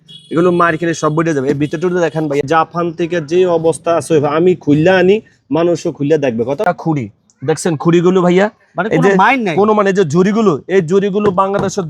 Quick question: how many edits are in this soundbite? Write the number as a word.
two